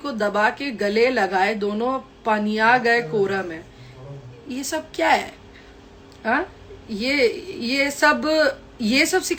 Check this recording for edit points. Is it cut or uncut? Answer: uncut